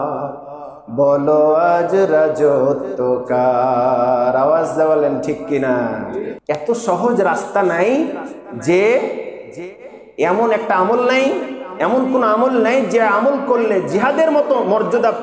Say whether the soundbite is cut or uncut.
cut